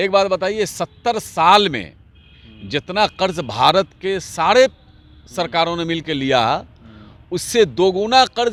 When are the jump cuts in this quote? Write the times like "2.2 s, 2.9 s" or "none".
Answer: none